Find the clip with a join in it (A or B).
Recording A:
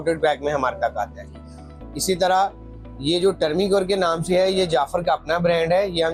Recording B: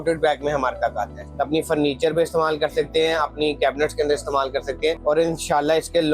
B